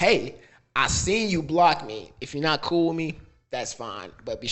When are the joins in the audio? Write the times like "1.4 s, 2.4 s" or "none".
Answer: none